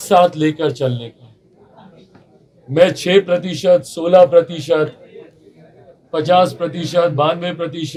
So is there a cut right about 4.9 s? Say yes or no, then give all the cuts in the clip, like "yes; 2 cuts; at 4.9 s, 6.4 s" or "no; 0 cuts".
no; 0 cuts